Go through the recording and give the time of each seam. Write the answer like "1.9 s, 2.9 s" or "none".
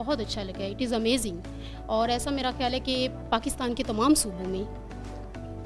none